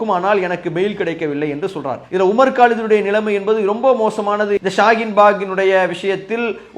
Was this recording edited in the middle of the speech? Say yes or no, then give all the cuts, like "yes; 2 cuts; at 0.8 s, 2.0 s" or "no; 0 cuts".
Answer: yes; 1 cut; at 4.6 s